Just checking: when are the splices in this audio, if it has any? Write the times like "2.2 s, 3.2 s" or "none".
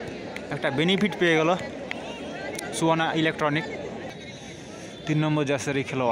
4.1 s